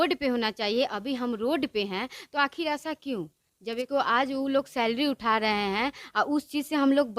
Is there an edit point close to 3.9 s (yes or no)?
yes